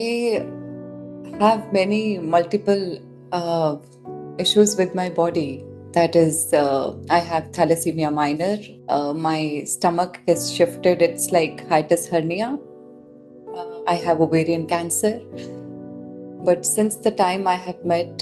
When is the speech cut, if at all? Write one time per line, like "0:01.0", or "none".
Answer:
none